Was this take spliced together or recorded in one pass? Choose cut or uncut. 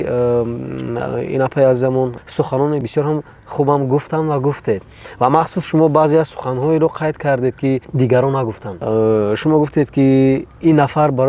cut